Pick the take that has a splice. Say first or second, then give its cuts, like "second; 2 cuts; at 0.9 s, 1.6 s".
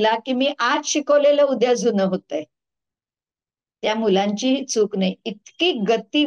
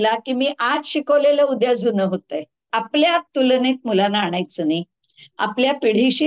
second; 1 cut; at 2.7 s